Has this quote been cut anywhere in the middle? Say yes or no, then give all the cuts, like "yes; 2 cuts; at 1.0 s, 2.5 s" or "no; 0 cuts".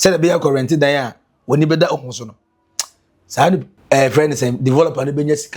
yes; 1 cut; at 3.7 s